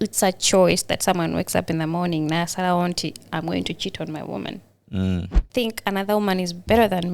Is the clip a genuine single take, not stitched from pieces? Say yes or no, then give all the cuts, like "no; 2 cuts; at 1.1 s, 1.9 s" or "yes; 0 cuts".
no; 1 cut; at 5.4 s